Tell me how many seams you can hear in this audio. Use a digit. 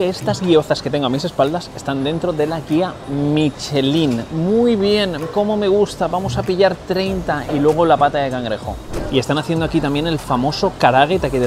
0